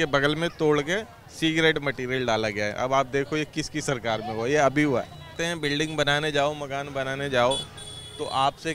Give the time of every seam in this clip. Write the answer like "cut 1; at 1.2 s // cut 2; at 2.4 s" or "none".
cut 1; at 5.4 s